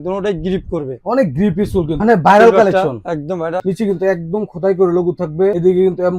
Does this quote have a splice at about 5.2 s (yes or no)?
no